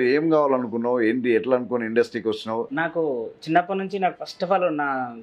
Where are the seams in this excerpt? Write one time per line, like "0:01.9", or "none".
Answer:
0:02.7